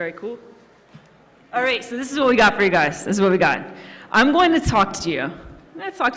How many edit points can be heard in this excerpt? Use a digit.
1